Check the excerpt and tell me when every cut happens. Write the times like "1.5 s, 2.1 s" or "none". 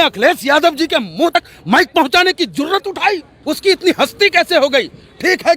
1.4 s, 3.3 s